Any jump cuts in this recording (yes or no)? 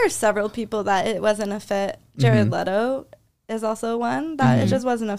no